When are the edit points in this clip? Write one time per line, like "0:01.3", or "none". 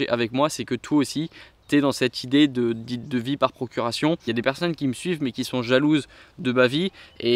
0:04.2